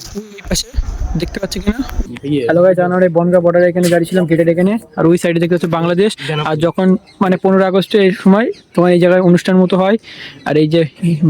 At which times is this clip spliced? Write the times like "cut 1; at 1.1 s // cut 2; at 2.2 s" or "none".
cut 1; at 2.0 s